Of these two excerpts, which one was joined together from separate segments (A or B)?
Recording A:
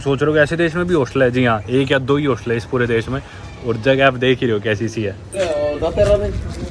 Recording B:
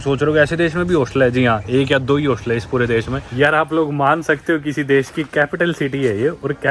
B